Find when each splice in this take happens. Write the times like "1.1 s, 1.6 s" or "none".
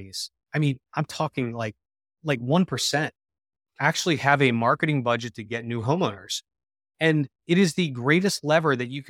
none